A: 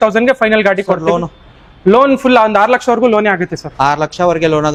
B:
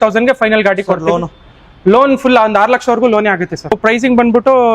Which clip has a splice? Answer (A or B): B